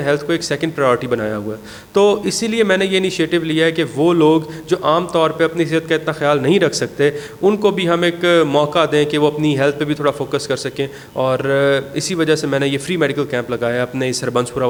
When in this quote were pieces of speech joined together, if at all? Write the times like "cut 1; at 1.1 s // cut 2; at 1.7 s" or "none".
none

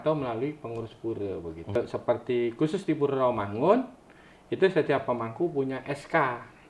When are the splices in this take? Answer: cut 1; at 1.7 s

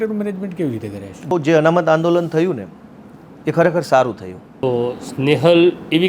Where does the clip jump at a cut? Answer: cut 1; at 1.3 s // cut 2; at 4.6 s

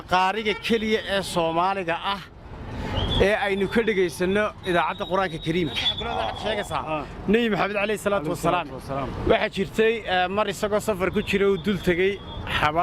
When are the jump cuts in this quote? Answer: cut 1; at 6.3 s

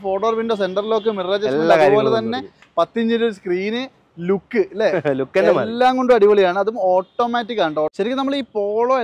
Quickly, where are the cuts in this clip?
cut 1; at 7.9 s

